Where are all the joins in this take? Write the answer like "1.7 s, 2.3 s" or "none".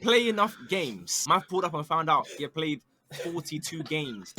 1.1 s